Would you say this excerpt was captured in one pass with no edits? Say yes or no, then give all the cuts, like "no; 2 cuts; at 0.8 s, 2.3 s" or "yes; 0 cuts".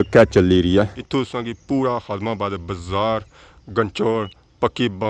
no; 1 cut; at 0.9 s